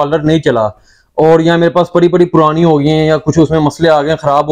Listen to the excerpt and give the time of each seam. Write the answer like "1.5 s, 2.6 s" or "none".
none